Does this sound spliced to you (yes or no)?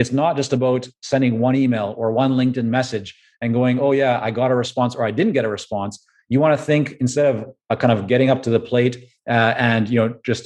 no